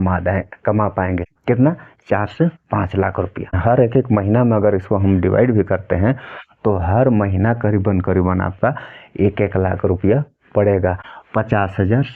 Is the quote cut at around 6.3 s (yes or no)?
no